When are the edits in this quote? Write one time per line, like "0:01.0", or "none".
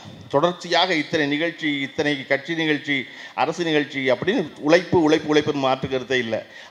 none